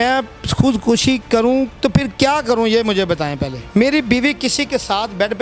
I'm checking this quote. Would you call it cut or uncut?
cut